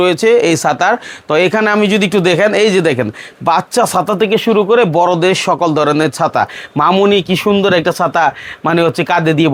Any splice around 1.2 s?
no; 0 cuts

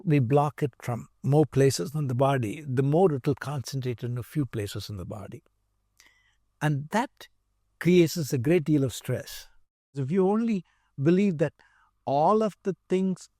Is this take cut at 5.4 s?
no; 1 cut; at 10.0 s

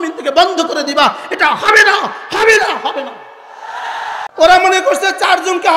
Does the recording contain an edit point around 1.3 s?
no; 1 cut; at 4.2 s

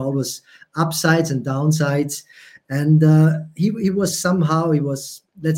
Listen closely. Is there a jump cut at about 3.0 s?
no; 0 cuts

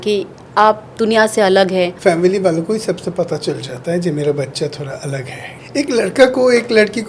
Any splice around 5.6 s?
yes; 2 cuts; at 1.9 s, 5.6 s

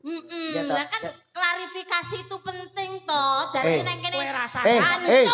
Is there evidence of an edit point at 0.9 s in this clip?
no; 0 cuts

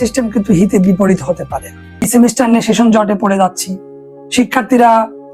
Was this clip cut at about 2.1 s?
yes; 1 cut; at 2.1 s

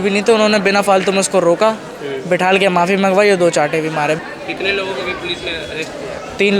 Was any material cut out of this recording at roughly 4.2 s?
yes; 1 cut; at 4.2 s

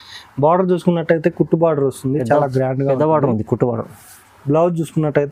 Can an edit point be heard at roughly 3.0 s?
no; 0 cuts

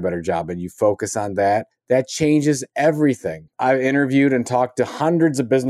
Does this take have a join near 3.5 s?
yes; 2 cuts; at 1.7 s, 3.5 s

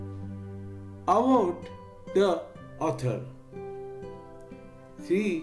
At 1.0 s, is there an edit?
yes; 1 cut; at 1.0 s

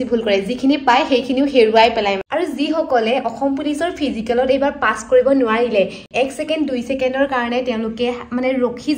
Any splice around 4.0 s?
no; 1 cut; at 2.2 s

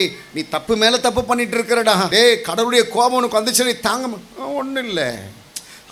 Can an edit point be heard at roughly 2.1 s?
yes; 1 cut; at 2.1 s

